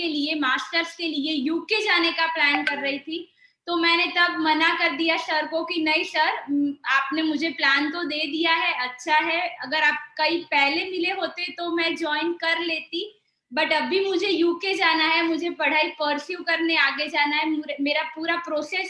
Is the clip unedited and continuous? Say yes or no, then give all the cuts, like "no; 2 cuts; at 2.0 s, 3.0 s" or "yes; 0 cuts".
yes; 0 cuts